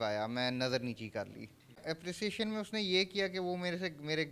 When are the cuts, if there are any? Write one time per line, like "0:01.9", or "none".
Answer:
0:01.8